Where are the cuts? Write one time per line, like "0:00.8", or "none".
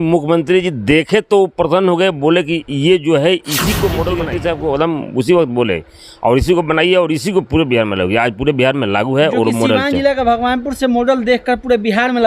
0:04.3